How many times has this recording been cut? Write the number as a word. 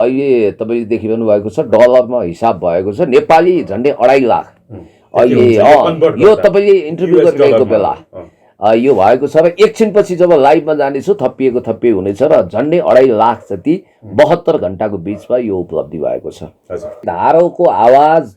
one